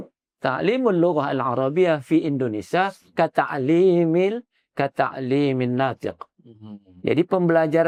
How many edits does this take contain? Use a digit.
0